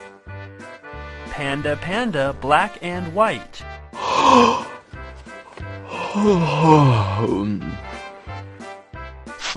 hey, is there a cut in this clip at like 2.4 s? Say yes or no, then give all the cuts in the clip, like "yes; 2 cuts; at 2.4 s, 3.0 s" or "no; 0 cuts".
yes; 2 cuts; at 1.2 s, 2.4 s